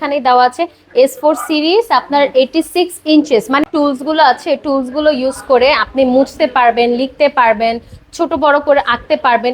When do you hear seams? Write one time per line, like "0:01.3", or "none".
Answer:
0:03.7